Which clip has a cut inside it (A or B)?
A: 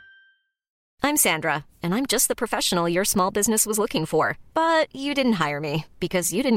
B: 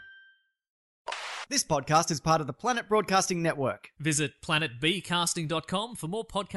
B